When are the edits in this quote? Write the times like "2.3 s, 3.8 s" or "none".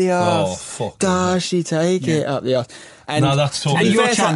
none